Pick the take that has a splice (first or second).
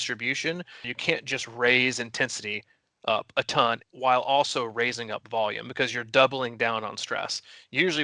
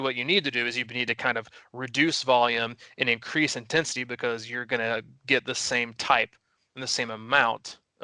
first